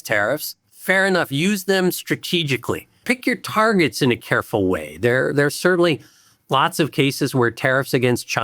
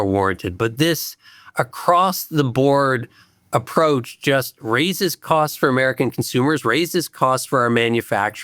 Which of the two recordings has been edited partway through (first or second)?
first